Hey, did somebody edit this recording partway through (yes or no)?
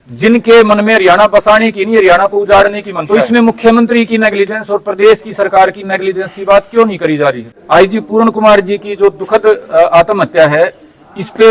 yes